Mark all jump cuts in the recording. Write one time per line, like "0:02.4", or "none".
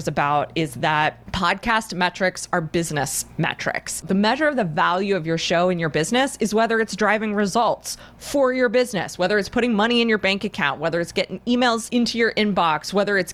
0:01.2
0:04.0
0:11.9